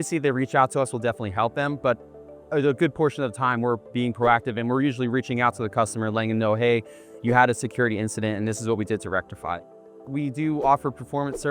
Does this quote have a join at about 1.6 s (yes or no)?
no